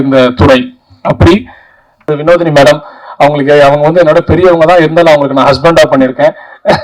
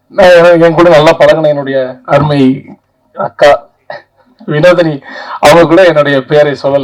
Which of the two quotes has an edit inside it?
first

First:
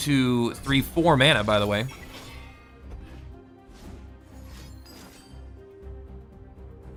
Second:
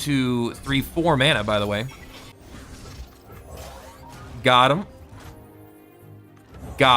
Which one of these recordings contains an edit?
second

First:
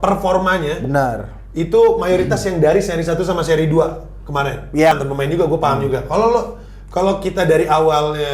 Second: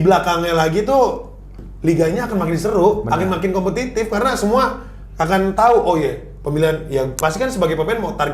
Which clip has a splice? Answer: first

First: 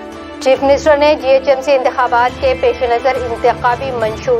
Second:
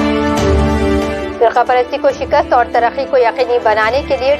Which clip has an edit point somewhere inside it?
second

